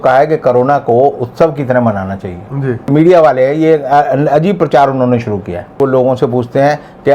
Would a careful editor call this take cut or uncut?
cut